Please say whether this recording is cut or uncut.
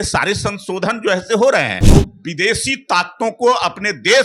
cut